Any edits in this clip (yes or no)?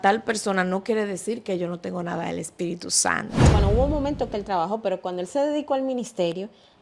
yes